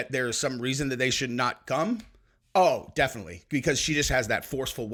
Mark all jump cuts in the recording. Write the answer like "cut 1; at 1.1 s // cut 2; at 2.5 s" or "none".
none